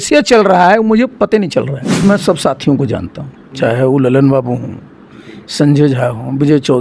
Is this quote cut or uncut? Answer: cut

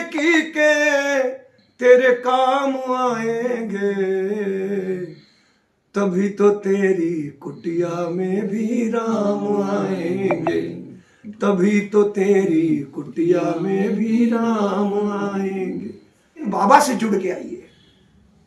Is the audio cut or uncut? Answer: cut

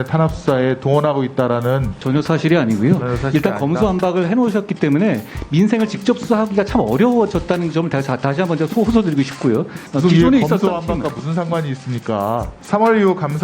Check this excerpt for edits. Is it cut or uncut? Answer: cut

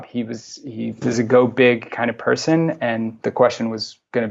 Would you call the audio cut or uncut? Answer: cut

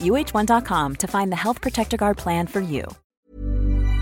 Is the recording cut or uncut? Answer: cut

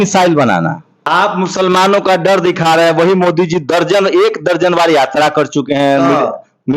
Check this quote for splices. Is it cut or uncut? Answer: cut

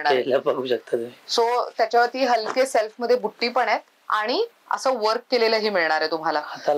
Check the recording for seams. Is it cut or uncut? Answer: uncut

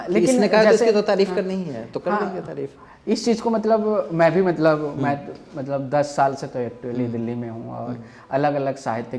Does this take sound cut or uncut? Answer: uncut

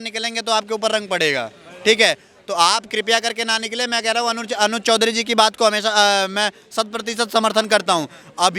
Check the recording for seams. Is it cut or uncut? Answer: uncut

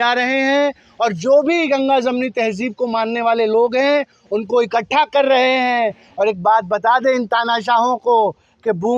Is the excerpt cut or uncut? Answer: uncut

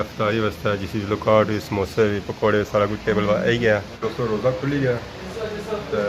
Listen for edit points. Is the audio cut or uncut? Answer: cut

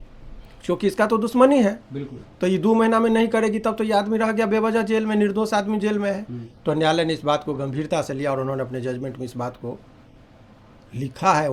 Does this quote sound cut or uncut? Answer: uncut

